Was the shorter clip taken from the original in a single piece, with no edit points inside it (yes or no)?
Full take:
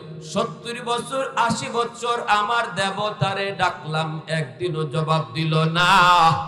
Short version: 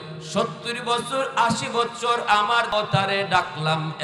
no